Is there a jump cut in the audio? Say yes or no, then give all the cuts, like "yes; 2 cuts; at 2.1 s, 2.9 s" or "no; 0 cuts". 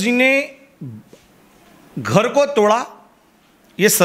no; 0 cuts